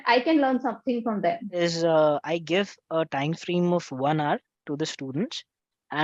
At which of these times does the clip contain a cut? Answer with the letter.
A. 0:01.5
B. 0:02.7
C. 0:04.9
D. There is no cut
A